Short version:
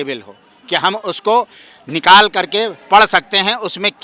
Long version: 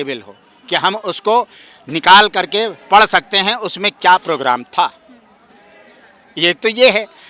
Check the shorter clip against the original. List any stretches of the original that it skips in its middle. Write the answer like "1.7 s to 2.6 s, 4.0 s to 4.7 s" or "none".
none